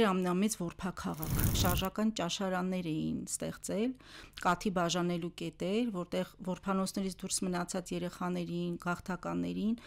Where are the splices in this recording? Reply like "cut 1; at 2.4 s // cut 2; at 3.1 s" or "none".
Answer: cut 1; at 1.6 s